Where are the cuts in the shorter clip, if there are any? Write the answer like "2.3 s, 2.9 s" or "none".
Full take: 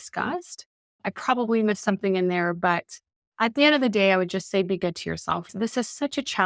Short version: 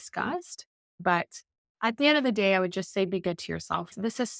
1.0 s